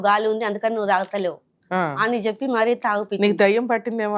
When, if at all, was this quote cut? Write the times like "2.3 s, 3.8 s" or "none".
none